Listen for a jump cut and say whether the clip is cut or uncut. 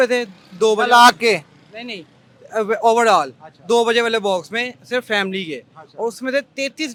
uncut